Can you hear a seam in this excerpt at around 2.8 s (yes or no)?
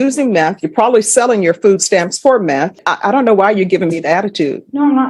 yes